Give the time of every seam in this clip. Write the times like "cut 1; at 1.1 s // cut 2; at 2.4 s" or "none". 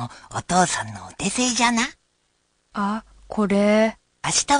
none